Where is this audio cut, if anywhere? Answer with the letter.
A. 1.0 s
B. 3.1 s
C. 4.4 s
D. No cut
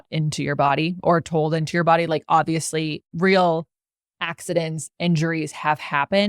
B